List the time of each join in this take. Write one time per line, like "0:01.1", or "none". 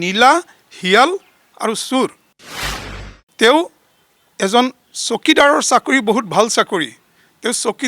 0:02.6